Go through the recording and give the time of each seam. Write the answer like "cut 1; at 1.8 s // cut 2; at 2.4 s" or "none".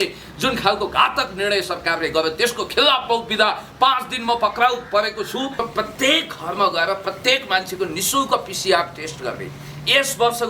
cut 1; at 5.5 s